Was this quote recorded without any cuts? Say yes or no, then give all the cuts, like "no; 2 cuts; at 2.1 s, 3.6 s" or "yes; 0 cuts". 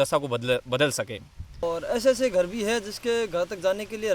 no; 1 cut; at 1.6 s